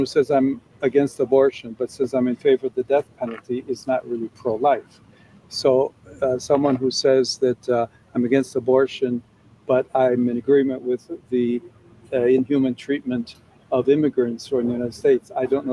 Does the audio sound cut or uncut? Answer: uncut